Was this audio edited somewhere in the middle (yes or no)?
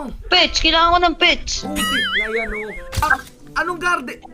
yes